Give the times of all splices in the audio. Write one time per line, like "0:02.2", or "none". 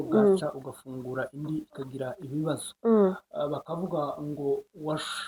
none